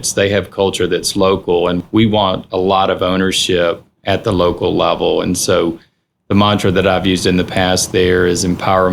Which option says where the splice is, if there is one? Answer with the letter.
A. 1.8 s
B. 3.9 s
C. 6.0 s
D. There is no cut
A